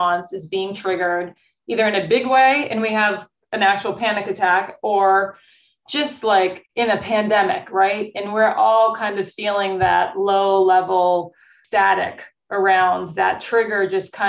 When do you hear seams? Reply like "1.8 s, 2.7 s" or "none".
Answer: 11.5 s